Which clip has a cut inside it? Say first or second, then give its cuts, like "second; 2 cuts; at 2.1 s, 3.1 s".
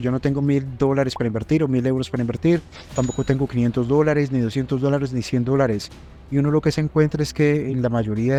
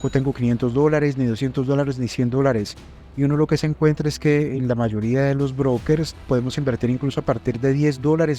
second; 1 cut; at 6.3 s